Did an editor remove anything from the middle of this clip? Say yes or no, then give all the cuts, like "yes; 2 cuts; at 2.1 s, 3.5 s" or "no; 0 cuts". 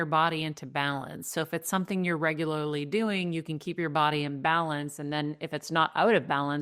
no; 0 cuts